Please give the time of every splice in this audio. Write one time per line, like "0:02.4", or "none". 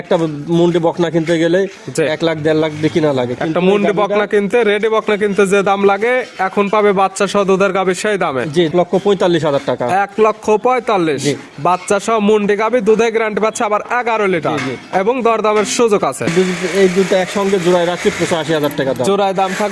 0:08.7
0:16.3